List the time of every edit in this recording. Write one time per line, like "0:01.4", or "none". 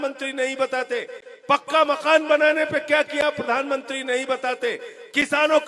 none